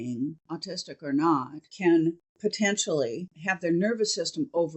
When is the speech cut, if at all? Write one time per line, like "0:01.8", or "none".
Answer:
0:01.6
0:02.3
0:03.3